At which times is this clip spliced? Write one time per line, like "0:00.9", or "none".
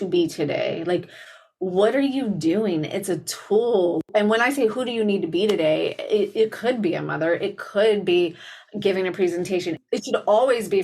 0:04.1
0:09.8